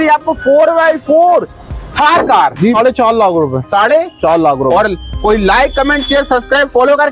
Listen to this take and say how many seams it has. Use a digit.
1